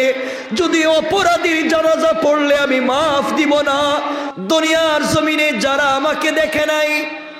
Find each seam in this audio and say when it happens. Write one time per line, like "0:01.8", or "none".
0:04.3

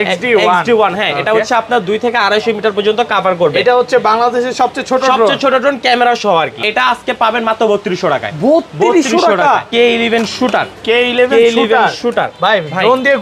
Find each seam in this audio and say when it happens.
0:06.6
0:09.7

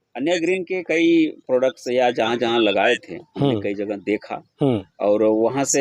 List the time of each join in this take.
none

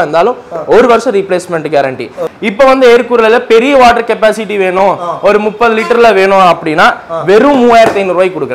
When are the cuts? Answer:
0:02.2

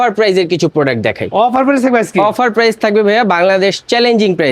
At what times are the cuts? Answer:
none

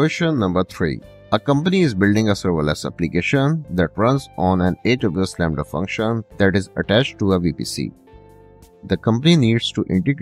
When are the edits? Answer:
0:01.1

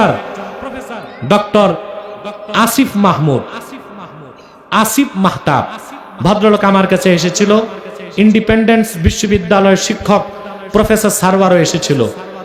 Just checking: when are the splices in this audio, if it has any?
none

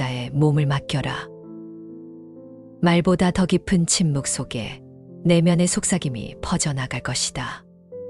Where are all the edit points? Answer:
0:01.2
0:02.8

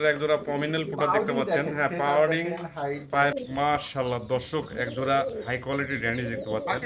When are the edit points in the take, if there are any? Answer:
0:03.4

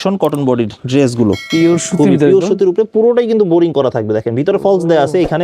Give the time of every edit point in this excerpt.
0:01.4

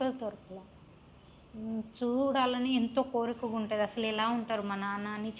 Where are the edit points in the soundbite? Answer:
none

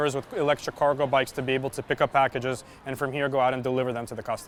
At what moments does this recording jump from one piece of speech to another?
none

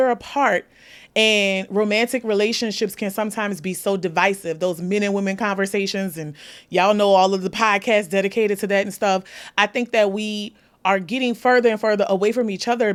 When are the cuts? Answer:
none

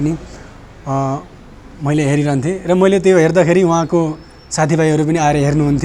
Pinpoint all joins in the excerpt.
none

